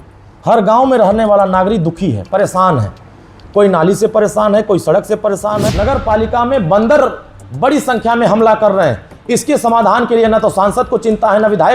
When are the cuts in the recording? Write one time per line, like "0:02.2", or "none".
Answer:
0:05.6